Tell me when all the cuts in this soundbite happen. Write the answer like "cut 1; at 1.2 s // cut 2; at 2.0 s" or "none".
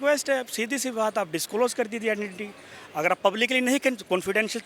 none